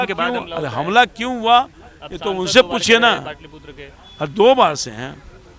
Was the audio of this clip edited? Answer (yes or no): no